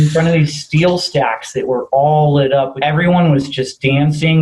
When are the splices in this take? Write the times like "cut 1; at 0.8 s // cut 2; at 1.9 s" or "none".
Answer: cut 1; at 2.7 s